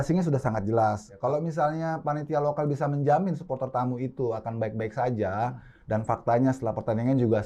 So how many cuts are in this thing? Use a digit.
1